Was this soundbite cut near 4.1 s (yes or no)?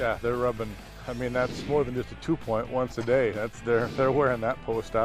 no